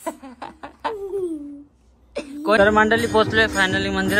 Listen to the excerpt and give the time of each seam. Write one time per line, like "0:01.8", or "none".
0:02.6